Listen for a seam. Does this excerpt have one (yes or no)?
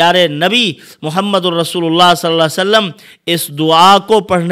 no